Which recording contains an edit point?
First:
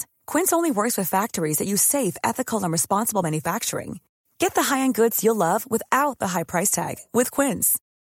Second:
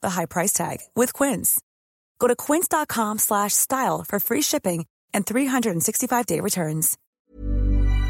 second; 1 cut; at 7.0 s

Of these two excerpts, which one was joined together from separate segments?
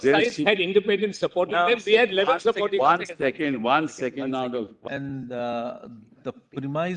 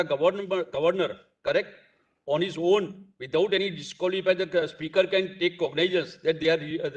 first; 1 cut; at 4.8 s

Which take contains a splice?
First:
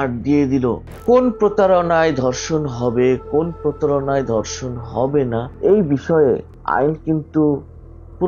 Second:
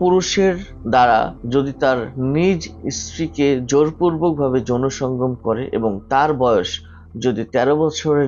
first; 3 cuts; at 0.9 s, 5.5 s, 6.5 s

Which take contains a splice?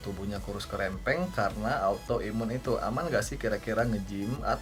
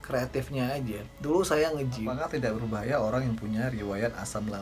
second; 1 cut; at 2.0 s

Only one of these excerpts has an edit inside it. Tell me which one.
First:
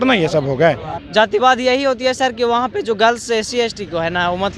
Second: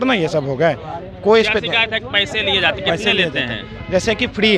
first; 1 cut; at 0.9 s

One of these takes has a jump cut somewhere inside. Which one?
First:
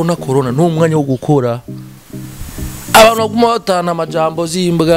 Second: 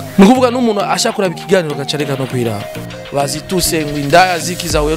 second; 1 cut; at 2.9 s

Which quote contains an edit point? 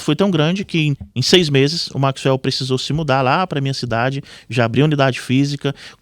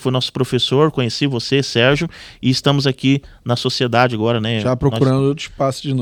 first; 1 cut; at 1.0 s

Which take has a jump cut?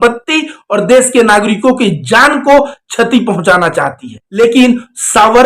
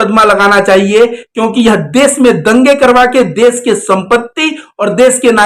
first; 1 cut; at 4.2 s

